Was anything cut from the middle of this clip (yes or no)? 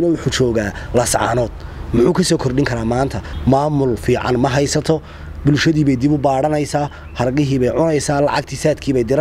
yes